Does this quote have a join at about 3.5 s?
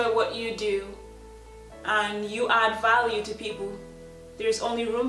no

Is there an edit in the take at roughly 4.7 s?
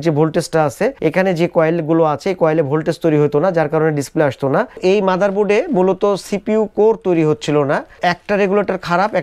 yes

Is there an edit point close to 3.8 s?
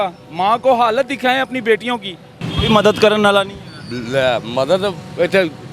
no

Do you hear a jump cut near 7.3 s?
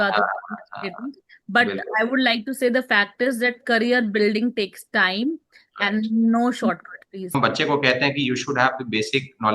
yes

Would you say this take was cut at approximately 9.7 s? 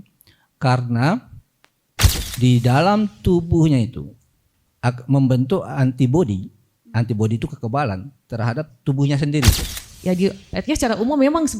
yes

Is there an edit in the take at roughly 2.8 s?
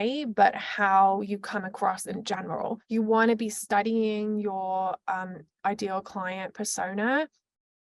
yes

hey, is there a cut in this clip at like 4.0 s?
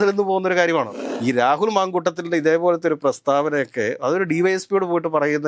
no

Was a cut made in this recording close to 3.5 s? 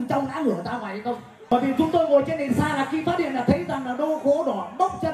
no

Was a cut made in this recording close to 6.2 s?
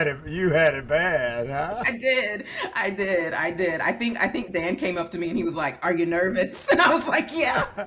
no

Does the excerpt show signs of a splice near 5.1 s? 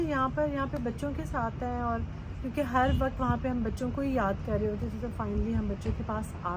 no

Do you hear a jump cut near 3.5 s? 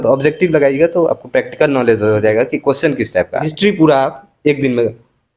yes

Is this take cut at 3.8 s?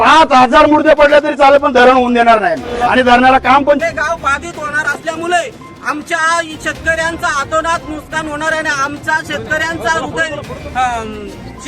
yes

